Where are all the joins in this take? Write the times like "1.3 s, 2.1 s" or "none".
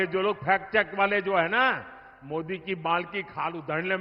none